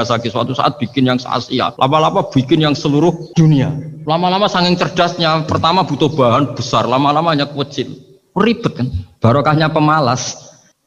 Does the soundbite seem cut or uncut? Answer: cut